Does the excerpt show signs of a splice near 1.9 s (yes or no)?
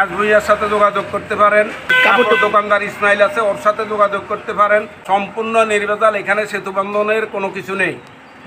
yes